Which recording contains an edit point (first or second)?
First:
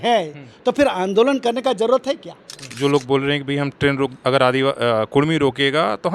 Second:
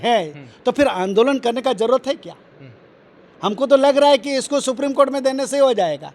first